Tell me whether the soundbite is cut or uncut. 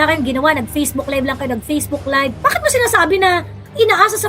cut